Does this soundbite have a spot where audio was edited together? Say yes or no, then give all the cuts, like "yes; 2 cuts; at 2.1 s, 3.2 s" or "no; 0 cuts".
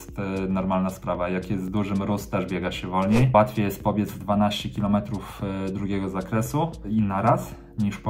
yes; 2 cuts; at 3.3 s, 6.8 s